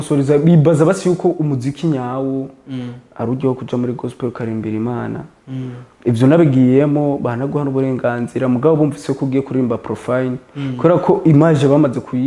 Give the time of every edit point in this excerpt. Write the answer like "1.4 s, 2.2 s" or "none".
none